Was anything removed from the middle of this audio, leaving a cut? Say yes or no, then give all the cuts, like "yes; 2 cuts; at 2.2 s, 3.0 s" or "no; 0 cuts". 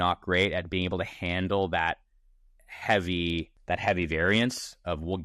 yes; 2 cuts; at 2.2 s, 3.5 s